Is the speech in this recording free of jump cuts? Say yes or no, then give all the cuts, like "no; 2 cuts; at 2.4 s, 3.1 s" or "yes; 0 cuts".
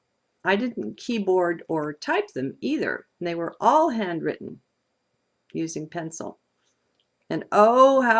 yes; 0 cuts